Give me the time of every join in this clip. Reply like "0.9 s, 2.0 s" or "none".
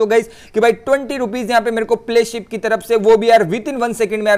none